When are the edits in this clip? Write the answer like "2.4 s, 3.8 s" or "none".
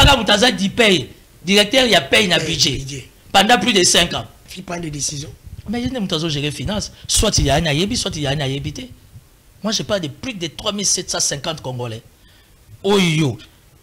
4.4 s